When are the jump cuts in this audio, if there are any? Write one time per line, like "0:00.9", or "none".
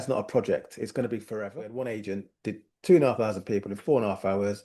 0:01.3